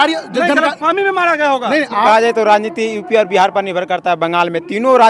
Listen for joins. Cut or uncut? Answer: cut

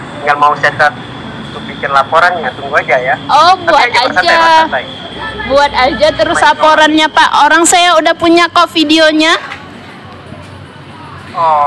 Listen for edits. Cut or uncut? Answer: uncut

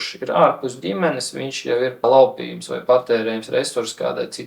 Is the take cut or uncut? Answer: cut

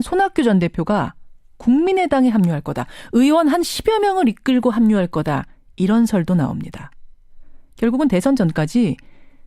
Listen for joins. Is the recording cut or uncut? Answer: cut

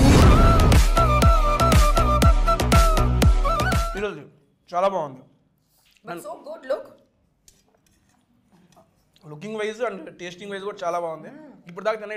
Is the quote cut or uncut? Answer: uncut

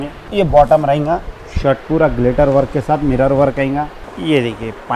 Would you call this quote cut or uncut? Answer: cut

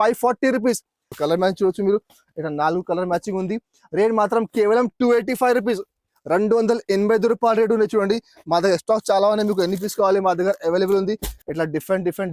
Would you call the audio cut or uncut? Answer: cut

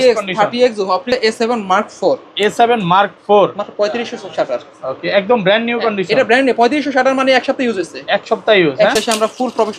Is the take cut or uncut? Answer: cut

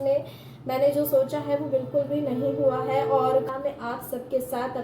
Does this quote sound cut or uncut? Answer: cut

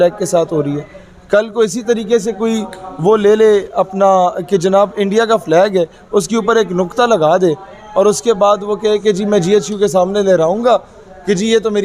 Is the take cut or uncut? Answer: uncut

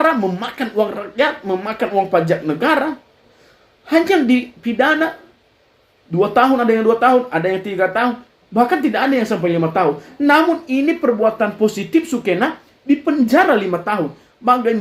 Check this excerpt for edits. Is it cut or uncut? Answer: uncut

